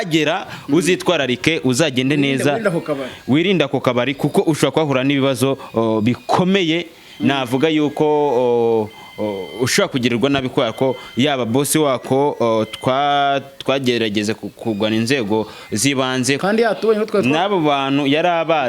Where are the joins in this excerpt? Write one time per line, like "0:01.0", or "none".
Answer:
0:16.4